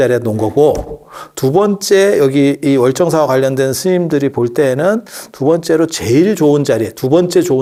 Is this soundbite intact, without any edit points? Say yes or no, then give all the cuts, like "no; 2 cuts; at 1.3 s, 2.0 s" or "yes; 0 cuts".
yes; 0 cuts